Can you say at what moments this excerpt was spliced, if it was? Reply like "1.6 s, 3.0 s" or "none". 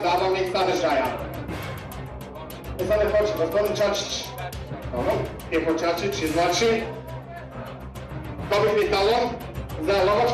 none